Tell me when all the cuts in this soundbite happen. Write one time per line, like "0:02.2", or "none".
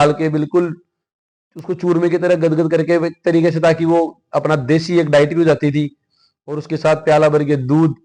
none

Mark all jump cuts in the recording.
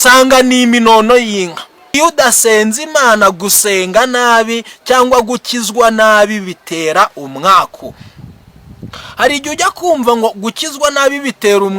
0:01.9

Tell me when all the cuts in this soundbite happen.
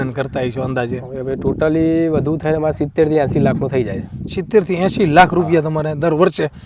none

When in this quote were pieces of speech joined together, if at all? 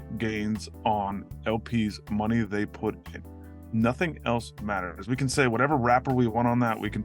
none

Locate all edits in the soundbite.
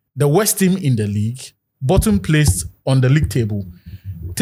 none

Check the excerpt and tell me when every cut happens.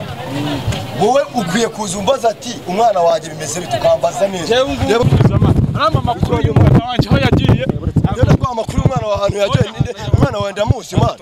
0:05.0

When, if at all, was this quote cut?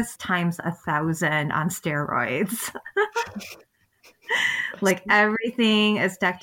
none

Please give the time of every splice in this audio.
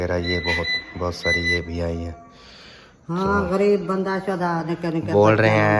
none

